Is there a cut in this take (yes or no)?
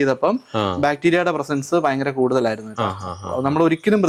no